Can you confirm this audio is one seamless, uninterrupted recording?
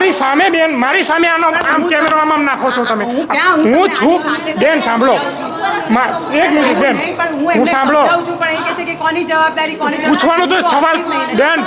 yes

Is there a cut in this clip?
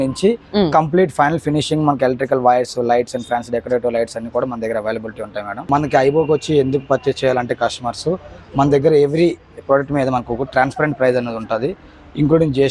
yes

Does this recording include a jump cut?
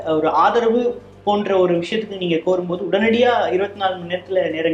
no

